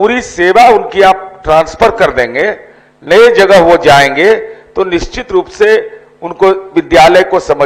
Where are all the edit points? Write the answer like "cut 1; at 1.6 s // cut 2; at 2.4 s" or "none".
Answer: none

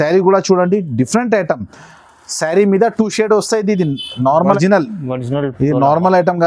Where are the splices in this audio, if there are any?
cut 1; at 4.5 s

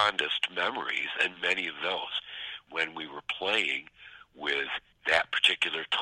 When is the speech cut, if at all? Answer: cut 1; at 2.6 s // cut 2; at 4.9 s

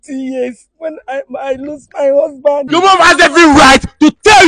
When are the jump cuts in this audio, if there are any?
cut 1; at 2.7 s

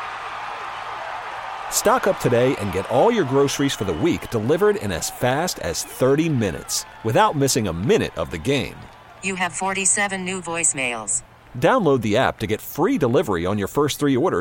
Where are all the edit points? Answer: none

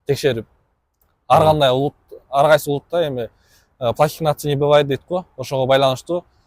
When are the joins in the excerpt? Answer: none

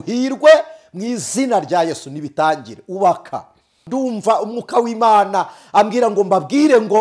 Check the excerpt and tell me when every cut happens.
cut 1; at 3.8 s

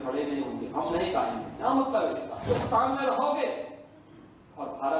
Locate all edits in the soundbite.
cut 1; at 2.4 s

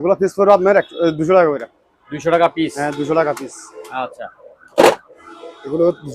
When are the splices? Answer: none

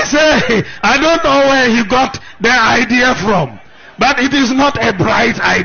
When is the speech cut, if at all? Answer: none

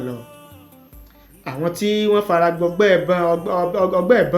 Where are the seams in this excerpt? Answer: none

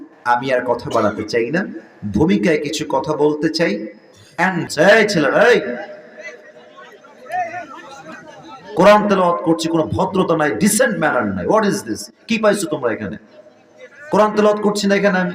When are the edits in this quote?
cut 1; at 4.7 s

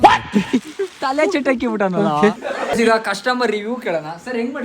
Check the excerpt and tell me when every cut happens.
cut 1; at 2.4 s

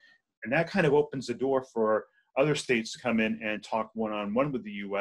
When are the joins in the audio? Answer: none

